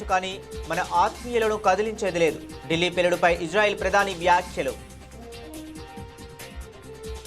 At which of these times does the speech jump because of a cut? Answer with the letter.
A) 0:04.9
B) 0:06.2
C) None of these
A